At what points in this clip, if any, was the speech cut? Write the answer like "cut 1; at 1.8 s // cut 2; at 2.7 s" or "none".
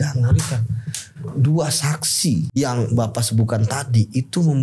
cut 1; at 2.5 s